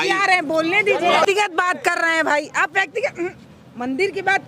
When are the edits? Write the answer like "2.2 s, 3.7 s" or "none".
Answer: 1.3 s

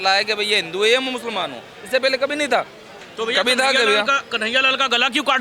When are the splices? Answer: none

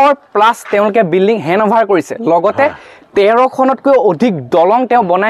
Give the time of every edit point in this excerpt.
none

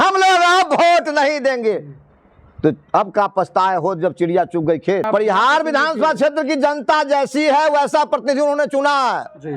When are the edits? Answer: 5.1 s

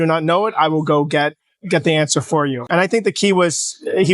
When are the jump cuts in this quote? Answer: 2.6 s

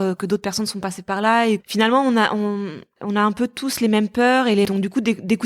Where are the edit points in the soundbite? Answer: 1.6 s, 2.9 s, 4.7 s

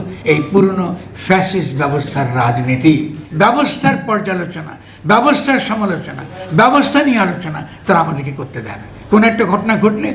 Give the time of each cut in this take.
3.2 s

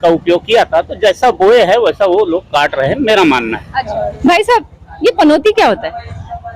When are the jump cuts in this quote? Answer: 3.7 s

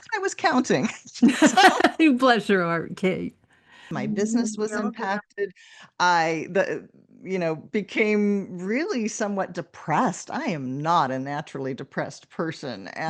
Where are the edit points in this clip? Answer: 3.9 s

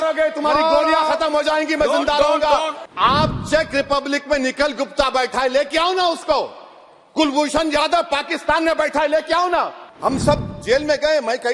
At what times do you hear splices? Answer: 2.8 s, 9.8 s

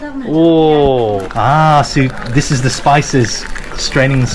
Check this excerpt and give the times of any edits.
1.2 s

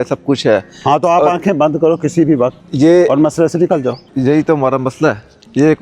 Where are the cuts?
2.6 s, 4.0 s

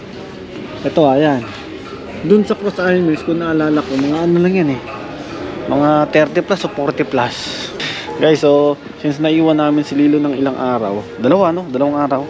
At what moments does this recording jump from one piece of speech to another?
7.7 s

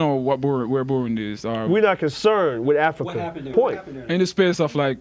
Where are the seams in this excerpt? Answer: 3.5 s

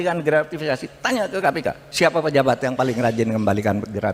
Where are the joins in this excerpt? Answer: 1.8 s

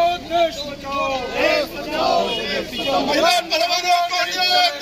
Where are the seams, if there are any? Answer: none

